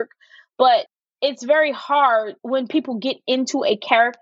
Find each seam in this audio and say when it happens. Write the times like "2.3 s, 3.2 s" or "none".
0.9 s, 2.4 s